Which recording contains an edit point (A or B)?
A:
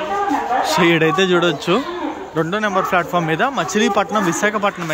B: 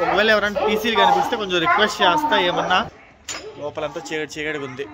B